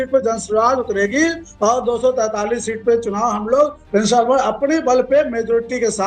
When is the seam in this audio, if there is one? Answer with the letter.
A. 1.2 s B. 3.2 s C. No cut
C